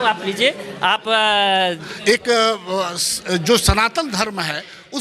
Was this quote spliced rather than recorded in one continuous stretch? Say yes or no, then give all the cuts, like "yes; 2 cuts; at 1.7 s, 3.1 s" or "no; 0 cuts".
yes; 1 cut; at 1.8 s